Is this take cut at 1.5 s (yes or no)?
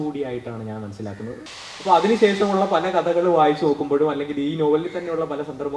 yes